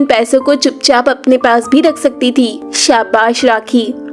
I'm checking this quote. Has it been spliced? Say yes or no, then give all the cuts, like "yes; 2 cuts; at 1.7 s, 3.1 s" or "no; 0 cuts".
yes; 1 cut; at 2.7 s